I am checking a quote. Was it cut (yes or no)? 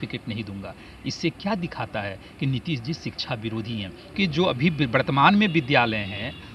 yes